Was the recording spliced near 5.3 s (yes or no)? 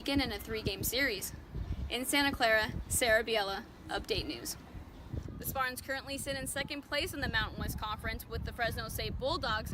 yes